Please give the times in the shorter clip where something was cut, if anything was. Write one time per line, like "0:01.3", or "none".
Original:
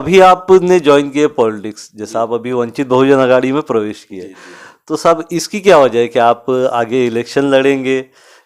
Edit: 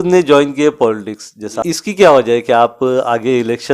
0:01.6